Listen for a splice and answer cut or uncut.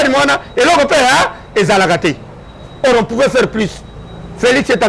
uncut